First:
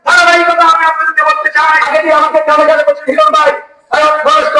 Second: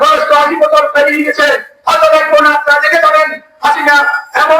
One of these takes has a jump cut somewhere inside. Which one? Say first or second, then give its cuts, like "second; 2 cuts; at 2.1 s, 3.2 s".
first; 1 cut; at 1.8 s